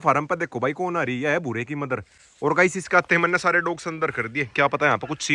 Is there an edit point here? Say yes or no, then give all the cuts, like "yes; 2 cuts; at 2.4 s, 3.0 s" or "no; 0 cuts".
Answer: no; 0 cuts